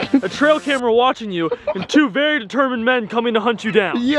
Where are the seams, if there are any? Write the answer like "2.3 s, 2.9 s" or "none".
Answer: none